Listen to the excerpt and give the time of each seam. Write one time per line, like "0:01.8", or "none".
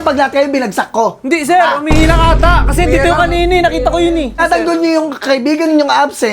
0:04.4